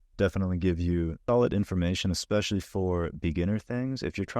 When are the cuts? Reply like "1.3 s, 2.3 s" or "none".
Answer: 1.2 s